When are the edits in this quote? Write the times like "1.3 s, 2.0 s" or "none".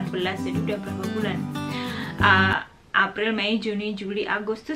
none